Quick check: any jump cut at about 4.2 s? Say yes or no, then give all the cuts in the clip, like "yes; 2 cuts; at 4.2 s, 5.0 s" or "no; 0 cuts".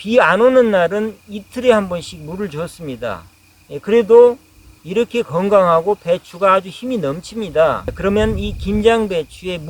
no; 1 cut; at 7.9 s